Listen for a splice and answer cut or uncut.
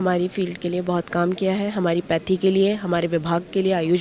uncut